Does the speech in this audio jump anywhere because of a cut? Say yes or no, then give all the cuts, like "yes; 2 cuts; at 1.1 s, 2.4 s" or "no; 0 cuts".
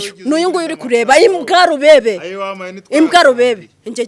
no; 0 cuts